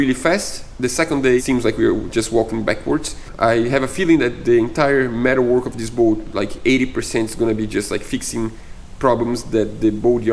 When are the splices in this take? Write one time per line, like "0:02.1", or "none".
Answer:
0:01.4
0:03.2